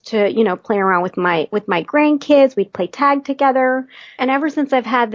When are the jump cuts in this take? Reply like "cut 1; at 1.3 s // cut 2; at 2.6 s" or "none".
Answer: cut 1; at 4.1 s